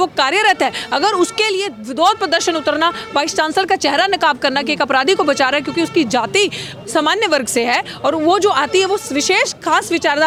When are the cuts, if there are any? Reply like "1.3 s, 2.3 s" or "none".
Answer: none